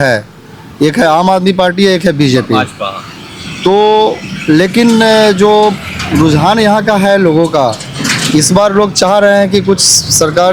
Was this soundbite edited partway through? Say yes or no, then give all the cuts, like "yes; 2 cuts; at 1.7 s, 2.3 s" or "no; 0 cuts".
no; 0 cuts